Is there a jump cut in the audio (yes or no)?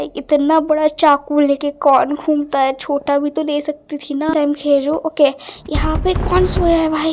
yes